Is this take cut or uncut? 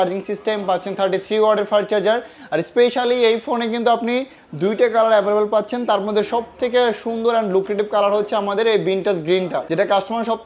uncut